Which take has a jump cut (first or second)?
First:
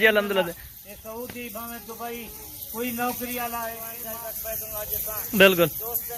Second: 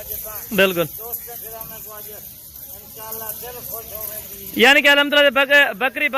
first